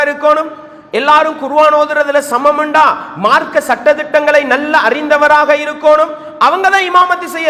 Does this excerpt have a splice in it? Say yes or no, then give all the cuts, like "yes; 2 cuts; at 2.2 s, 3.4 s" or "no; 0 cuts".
no; 0 cuts